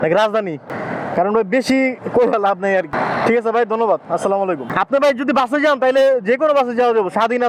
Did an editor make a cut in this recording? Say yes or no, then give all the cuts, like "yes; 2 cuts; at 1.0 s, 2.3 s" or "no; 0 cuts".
no; 0 cuts